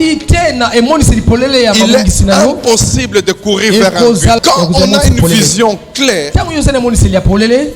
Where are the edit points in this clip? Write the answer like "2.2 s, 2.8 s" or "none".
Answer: 4.4 s